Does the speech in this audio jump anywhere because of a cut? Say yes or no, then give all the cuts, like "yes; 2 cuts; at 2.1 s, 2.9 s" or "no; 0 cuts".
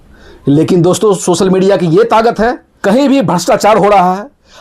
yes; 1 cut; at 2.7 s